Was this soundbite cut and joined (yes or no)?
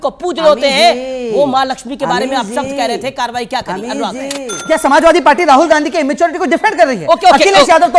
yes